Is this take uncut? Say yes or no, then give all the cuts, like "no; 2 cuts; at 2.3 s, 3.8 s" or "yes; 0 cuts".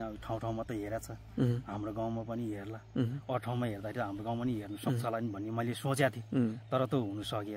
yes; 0 cuts